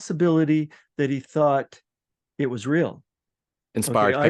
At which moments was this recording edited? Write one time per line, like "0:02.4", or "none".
none